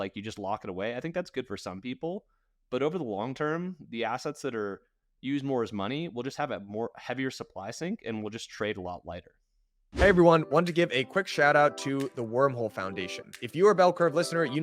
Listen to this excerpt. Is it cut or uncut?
cut